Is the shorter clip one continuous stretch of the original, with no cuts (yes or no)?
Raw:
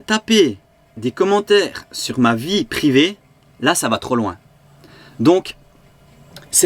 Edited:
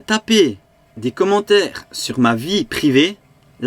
yes